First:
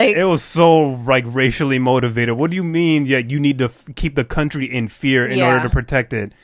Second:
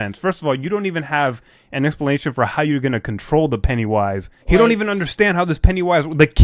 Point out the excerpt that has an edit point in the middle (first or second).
second